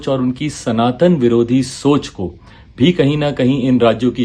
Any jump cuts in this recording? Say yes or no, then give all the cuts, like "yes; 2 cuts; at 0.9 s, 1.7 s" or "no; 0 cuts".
no; 0 cuts